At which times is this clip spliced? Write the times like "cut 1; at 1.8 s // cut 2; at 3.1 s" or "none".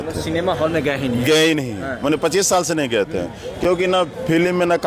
none